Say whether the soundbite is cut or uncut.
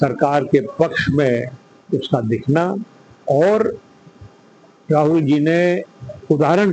uncut